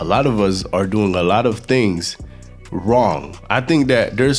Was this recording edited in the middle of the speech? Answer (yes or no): no